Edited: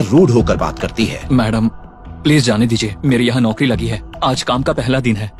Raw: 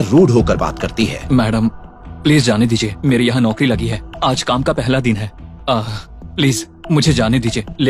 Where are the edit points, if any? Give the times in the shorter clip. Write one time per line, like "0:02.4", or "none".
none